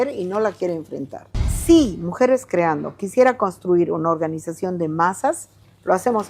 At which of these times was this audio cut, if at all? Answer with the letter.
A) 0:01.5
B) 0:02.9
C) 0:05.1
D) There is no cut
A